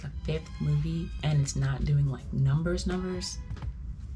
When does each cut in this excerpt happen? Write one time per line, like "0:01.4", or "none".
0:01.1